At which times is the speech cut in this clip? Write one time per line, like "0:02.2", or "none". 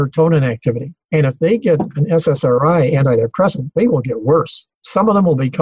0:00.9